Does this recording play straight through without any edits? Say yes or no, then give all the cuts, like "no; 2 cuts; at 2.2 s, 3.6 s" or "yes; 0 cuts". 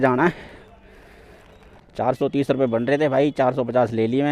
no; 1 cut; at 1.9 s